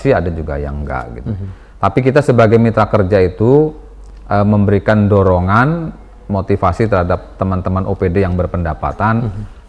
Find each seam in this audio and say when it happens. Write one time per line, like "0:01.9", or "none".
none